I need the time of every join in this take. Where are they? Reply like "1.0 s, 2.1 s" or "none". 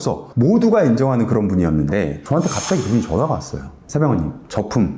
2.2 s

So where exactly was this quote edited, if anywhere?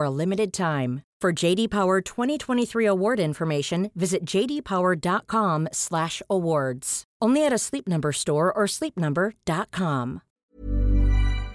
10.4 s

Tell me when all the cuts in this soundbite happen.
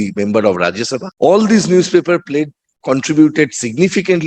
1.0 s

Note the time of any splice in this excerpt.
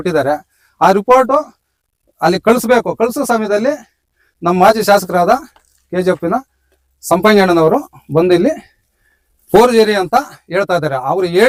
none

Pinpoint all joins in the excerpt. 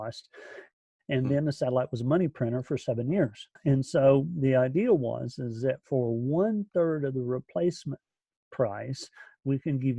3.6 s

